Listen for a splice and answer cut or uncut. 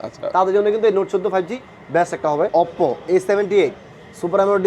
cut